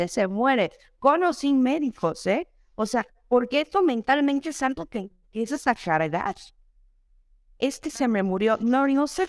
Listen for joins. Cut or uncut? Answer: uncut